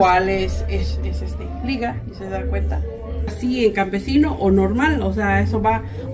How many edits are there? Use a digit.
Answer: 1